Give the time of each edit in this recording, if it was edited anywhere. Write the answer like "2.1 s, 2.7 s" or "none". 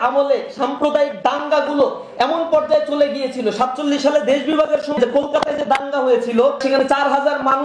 5.0 s, 6.6 s